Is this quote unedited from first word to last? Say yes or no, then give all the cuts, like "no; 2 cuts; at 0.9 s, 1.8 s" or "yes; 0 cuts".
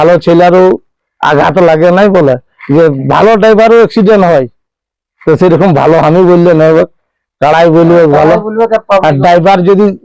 yes; 0 cuts